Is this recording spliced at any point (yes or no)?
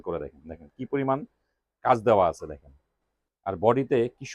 no